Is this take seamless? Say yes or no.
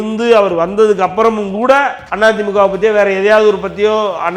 no